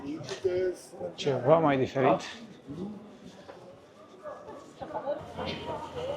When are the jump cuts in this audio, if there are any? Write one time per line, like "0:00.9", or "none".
0:05.2